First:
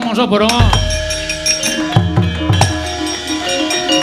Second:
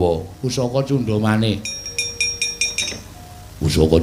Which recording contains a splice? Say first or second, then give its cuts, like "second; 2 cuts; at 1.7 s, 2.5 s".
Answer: second; 1 cut; at 1.8 s